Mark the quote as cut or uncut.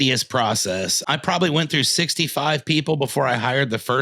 cut